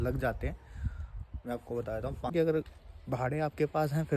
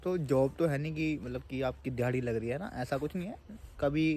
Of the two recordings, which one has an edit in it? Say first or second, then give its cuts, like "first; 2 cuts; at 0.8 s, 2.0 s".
first; 1 cut; at 2.3 s